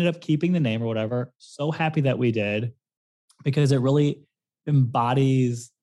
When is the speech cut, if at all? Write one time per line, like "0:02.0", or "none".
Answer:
0:01.1